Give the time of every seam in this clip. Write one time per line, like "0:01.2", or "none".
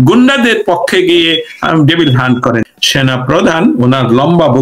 0:02.7